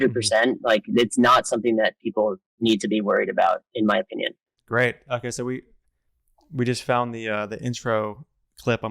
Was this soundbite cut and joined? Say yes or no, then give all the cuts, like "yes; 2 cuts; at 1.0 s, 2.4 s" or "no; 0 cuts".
no; 0 cuts